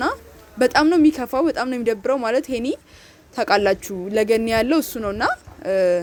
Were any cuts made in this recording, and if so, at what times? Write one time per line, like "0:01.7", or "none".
none